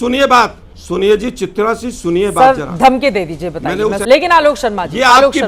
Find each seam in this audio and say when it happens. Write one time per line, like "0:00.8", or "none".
0:04.0